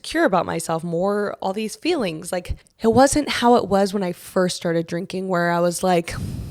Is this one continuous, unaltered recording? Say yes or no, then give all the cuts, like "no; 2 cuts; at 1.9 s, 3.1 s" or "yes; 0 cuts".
yes; 0 cuts